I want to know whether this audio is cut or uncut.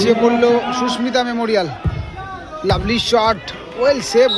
uncut